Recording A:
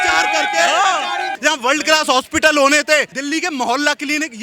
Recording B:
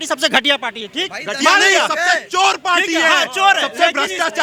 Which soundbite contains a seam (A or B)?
A